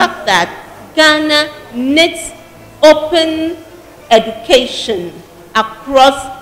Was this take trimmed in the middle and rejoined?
no; 0 cuts

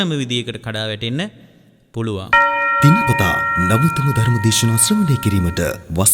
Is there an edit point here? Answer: yes; 1 cut; at 2.4 s

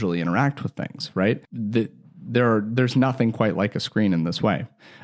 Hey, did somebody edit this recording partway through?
no; 0 cuts

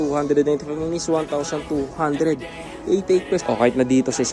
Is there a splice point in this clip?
yes; 1 cut; at 3.4 s

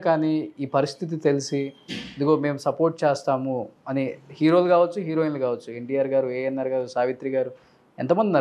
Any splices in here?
no; 0 cuts

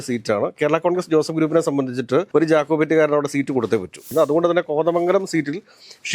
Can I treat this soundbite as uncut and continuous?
no; 1 cut; at 4.0 s

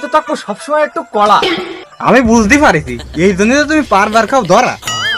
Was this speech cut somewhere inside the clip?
no; 0 cuts

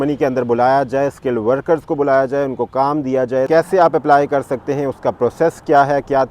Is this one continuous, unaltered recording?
no; 1 cut; at 3.5 s

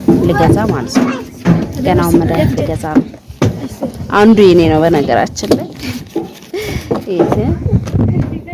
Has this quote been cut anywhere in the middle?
no; 0 cuts

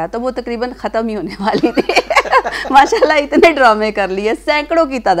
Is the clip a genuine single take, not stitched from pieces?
yes; 0 cuts

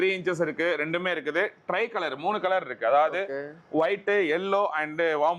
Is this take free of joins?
yes; 0 cuts

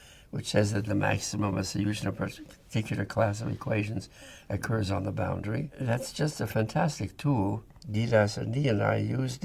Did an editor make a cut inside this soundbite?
yes; 2 cuts; at 5.7 s, 7.8 s

